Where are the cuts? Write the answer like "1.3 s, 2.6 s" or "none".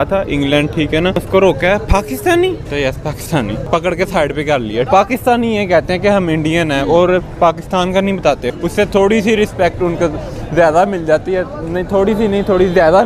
1.2 s, 2.6 s, 3.6 s, 4.9 s, 8.5 s

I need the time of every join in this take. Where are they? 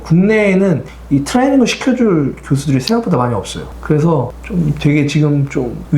3.6 s

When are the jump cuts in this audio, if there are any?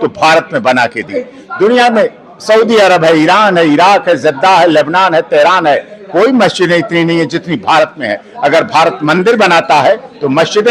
none

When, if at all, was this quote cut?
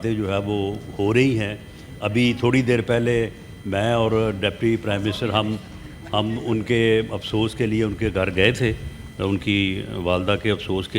none

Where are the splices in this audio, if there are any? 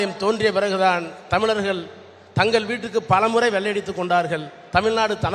none

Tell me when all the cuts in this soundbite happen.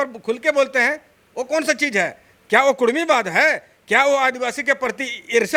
none

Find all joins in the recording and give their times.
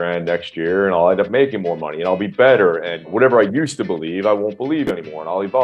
3.1 s

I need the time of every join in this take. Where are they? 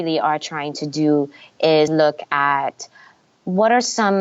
1.9 s

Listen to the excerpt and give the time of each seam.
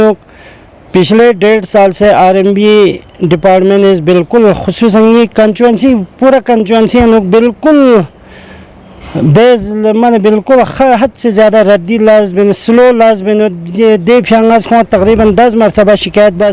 none

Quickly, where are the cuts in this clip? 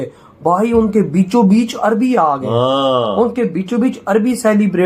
none

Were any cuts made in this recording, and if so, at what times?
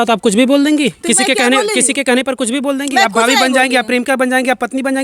none

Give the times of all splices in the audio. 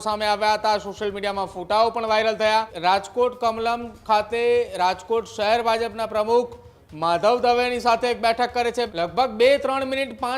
2.7 s, 8.9 s

